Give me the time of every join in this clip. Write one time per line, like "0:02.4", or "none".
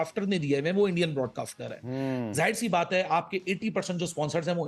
none